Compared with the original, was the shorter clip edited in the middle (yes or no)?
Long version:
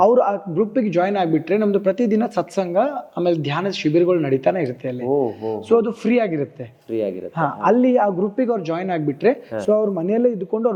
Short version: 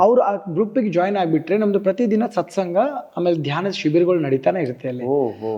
no